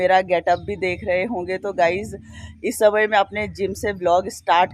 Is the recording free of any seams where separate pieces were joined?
yes; 0 cuts

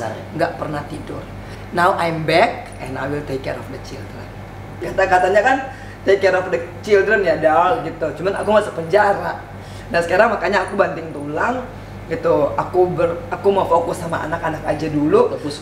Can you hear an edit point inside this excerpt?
yes; 2 cuts; at 1.5 s, 4.9 s

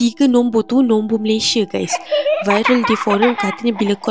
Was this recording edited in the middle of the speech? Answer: no; 0 cuts

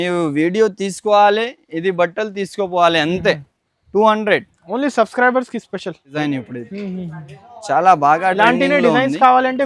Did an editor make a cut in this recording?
yes; 1 cut; at 6.1 s

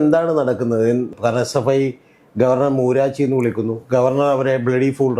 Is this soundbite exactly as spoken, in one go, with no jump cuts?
no; 1 cut; at 1.1 s

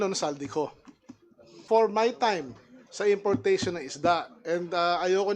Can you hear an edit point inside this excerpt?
yes; 1 cut; at 1.6 s

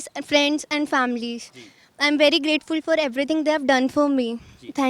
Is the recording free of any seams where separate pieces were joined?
yes; 0 cuts

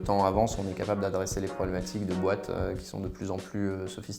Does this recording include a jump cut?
no; 0 cuts

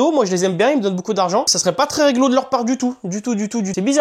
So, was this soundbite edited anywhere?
no; 0 cuts

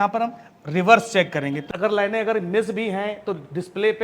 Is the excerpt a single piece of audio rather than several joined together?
no; 1 cut; at 1.6 s

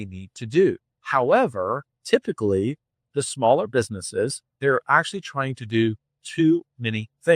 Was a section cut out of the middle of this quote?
yes; 3 cuts; at 0.9 s, 1.9 s, 4.6 s

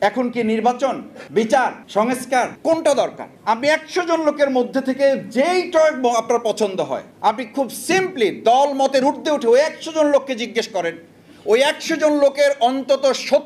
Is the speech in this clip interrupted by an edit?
yes; 4 cuts; at 1.1 s, 2.2 s, 3.3 s, 7.1 s

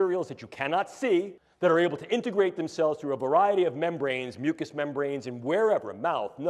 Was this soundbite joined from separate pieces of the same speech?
yes; 1 cut; at 1.4 s

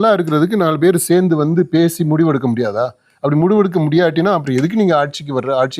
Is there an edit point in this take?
no; 0 cuts

